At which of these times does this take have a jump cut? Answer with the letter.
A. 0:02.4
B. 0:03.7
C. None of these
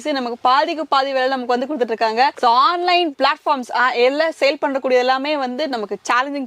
C